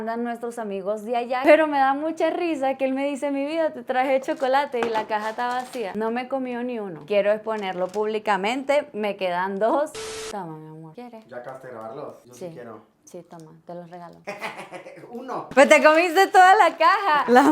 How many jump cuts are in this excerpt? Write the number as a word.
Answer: two